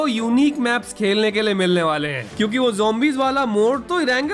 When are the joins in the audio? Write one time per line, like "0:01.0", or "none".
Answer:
0:02.2

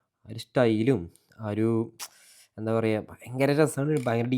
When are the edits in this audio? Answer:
none

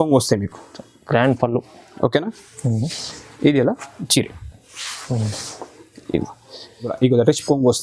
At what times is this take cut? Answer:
0:06.9

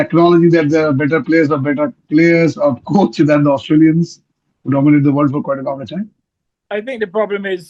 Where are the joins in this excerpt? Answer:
0:06.6

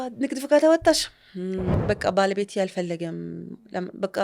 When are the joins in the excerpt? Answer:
0:01.7

